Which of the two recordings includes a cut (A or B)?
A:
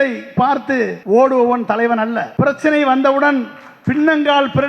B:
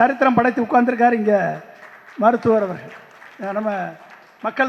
A